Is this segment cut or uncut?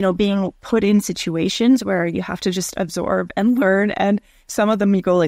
uncut